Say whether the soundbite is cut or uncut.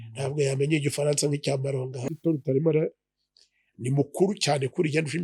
cut